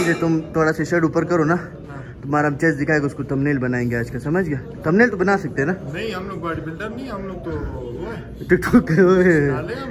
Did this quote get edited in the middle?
no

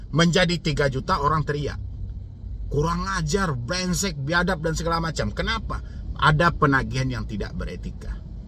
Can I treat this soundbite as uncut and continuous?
yes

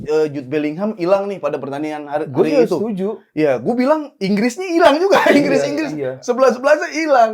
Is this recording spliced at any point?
no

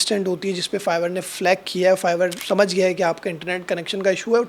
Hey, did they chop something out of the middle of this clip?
yes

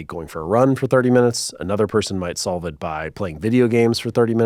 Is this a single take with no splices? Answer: yes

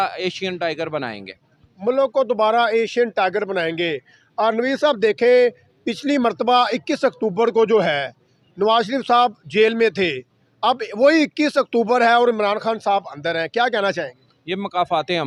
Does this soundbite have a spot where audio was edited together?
no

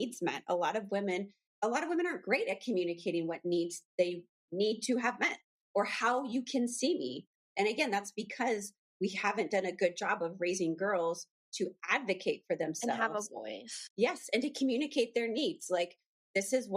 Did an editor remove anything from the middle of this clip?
yes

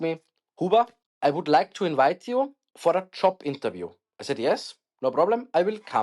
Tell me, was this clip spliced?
yes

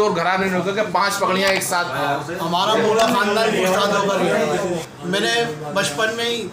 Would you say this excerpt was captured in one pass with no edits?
no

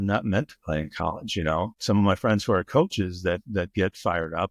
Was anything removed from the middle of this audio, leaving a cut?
yes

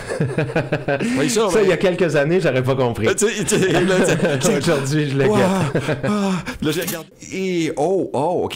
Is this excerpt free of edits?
no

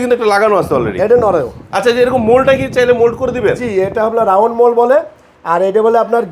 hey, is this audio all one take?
yes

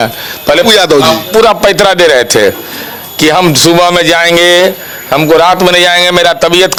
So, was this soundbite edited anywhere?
no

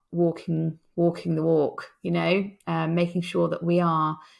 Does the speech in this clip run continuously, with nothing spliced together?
yes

